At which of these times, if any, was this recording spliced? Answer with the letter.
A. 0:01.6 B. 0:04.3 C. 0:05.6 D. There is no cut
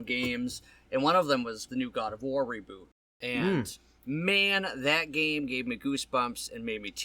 A